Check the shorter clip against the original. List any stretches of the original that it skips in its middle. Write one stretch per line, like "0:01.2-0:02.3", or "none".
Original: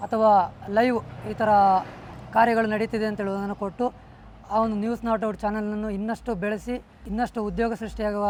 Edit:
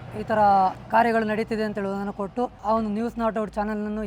0:01.9-0:02.2
0:04.0-0:04.4